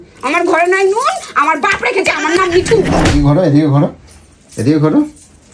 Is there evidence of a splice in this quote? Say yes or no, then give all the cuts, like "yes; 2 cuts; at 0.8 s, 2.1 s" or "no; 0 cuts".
yes; 1 cut; at 3.0 s